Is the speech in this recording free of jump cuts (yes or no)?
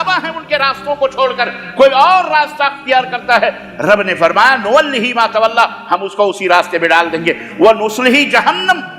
yes